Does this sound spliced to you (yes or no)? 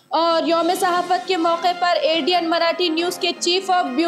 no